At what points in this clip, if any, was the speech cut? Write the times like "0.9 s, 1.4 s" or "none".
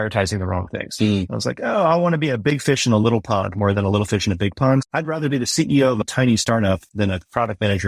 4.8 s, 6.1 s, 6.8 s